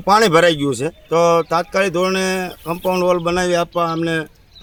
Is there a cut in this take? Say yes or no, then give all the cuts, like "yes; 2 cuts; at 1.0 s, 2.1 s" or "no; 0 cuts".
no; 0 cuts